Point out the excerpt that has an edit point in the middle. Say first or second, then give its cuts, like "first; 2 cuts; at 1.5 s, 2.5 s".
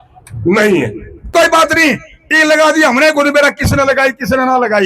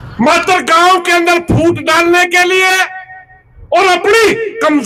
first; 1 cut; at 1.3 s